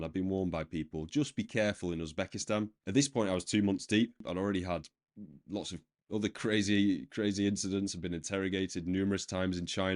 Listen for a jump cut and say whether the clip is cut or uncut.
cut